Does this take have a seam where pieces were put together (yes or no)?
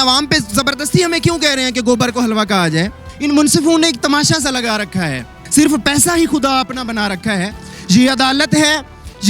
yes